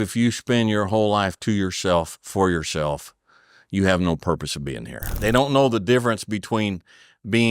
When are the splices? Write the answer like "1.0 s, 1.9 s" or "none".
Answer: 5.1 s